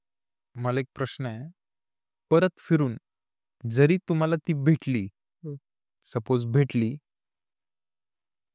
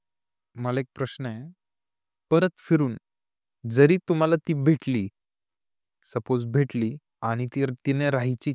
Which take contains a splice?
second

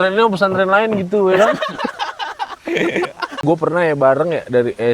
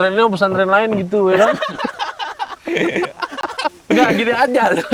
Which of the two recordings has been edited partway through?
first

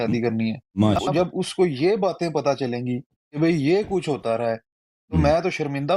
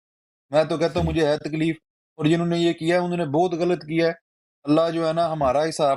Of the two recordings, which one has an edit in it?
first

